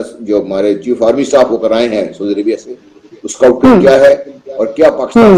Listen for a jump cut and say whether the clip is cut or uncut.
uncut